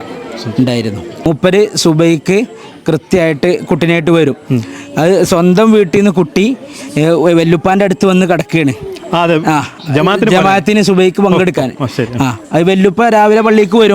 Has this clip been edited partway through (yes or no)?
yes